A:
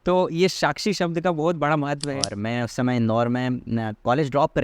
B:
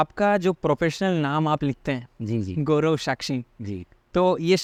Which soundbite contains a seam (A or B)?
A